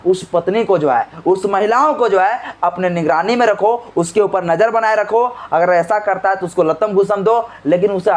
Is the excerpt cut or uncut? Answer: uncut